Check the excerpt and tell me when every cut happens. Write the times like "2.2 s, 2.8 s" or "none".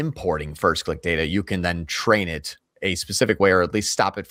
none